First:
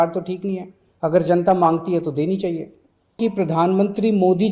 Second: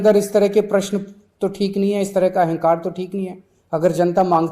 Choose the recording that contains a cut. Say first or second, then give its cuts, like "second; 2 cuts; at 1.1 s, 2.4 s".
first; 1 cut; at 3.2 s